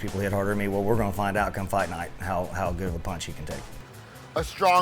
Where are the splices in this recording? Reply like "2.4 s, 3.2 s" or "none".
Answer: 3.7 s

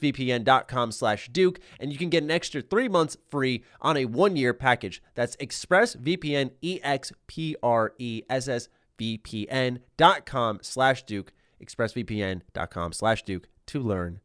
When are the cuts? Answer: none

